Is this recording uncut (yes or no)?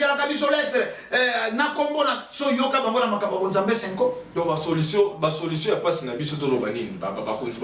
no